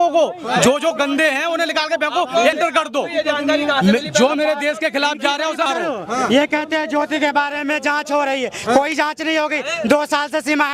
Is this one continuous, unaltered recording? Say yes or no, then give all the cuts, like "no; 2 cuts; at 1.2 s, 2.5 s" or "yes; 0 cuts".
no; 2 cuts; at 2.6 s, 5.7 s